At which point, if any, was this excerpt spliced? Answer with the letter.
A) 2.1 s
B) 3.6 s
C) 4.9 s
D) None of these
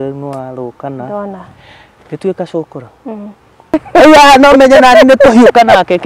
B